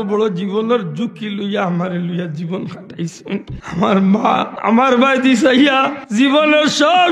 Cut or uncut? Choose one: cut